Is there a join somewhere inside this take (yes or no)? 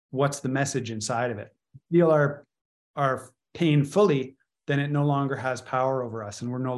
yes